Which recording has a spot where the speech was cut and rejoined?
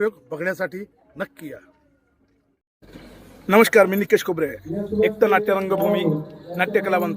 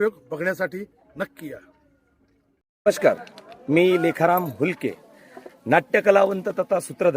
first; 1 cut; at 2.7 s

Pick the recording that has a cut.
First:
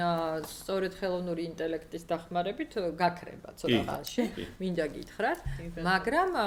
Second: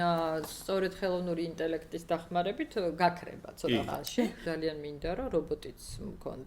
second; 1 cut; at 4.4 s

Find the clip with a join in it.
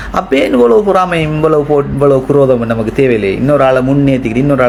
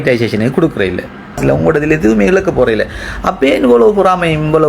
second; 1 cut; at 1.4 s

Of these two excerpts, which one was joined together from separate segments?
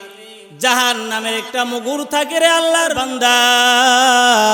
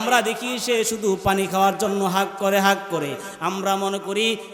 first; 1 cut; at 3.0 s

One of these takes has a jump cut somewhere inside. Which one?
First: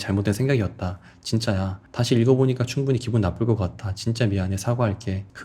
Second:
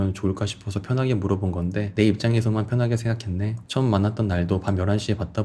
second; 2 cuts; at 1.9 s, 3.6 s

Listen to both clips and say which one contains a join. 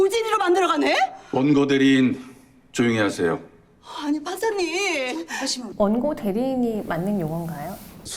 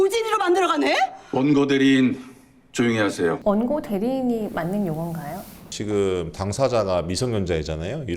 second; 2 cuts; at 3.4 s, 5.6 s

